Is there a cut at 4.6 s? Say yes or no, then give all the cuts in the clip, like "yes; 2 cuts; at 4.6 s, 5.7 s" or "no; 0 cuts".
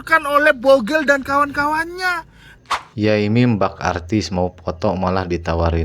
no; 1 cut; at 2.5 s